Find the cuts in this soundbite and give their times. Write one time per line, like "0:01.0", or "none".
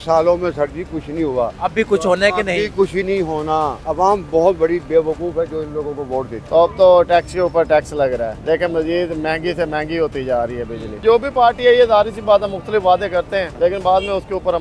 0:01.5
0:03.8
0:06.4
0:08.4
0:11.0
0:13.5